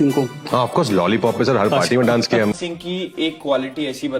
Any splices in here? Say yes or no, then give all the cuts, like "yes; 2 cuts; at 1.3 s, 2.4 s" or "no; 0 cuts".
yes; 1 cut; at 2.5 s